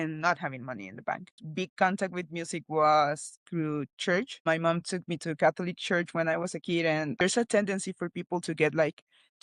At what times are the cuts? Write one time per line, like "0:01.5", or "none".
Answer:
0:01.3
0:07.2